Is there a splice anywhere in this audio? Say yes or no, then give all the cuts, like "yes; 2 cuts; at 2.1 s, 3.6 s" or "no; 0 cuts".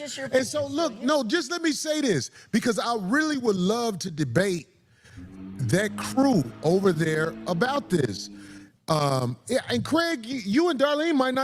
yes; 1 cut; at 1.8 s